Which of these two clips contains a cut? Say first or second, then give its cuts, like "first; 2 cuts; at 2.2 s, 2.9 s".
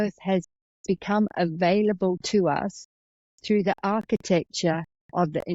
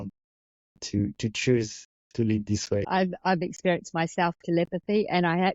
second; 1 cut; at 2.9 s